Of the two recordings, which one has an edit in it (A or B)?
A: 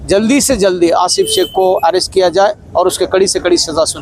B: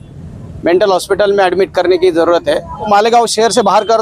B